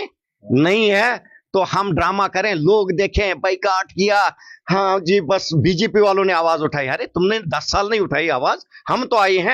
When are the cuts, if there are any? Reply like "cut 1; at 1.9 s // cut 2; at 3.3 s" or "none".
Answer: none

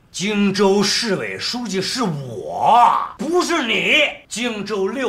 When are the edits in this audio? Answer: cut 1; at 3.1 s // cut 2; at 4.2 s

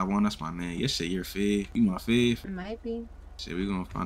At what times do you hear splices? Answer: cut 1; at 1.7 s // cut 2; at 2.4 s

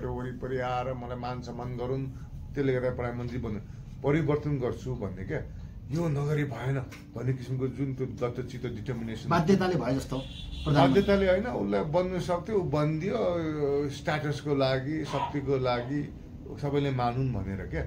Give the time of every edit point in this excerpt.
none

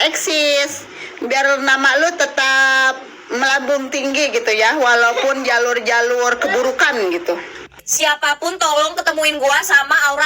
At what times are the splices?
cut 1; at 7.8 s

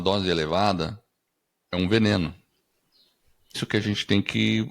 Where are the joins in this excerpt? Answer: cut 1; at 3.6 s

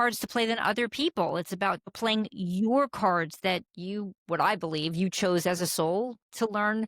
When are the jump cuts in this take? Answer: cut 1; at 1.9 s

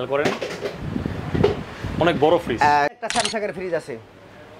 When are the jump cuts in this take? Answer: cut 1; at 2.9 s

